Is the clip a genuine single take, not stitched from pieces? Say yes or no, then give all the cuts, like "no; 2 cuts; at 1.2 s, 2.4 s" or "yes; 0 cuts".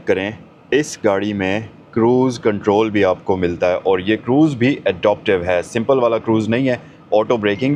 yes; 0 cuts